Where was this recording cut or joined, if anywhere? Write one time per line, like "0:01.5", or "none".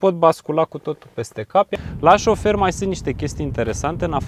0:01.7